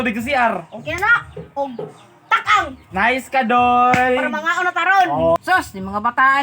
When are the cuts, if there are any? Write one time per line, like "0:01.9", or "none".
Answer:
0:05.4